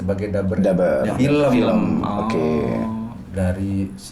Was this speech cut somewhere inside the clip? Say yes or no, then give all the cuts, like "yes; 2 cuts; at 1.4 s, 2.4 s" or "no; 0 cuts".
no; 0 cuts